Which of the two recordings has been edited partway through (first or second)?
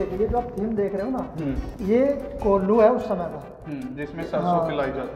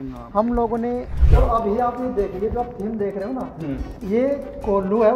second